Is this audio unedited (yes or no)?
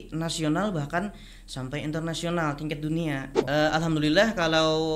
no